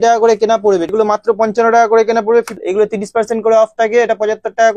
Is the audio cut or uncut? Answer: cut